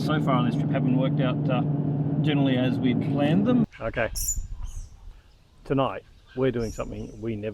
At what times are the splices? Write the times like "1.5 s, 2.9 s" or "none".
3.6 s